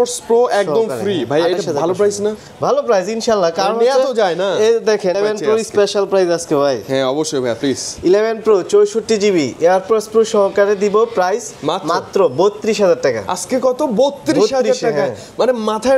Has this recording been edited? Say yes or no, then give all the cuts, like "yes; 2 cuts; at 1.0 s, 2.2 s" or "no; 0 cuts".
yes; 1 cut; at 5.1 s